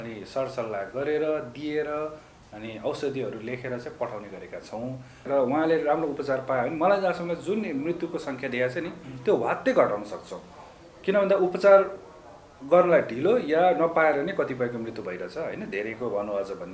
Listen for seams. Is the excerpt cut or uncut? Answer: cut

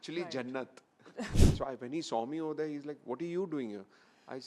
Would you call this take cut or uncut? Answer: cut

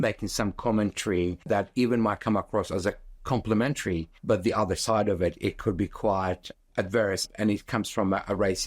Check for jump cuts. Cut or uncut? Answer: cut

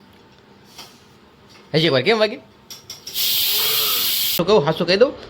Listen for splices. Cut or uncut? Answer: cut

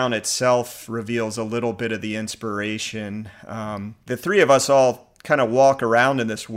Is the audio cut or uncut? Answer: uncut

